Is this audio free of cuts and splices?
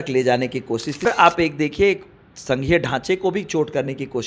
no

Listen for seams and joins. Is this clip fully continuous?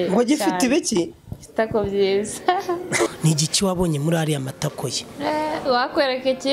no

